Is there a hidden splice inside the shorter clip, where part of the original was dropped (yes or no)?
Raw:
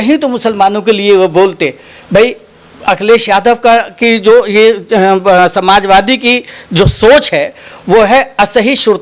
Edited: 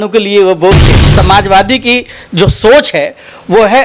yes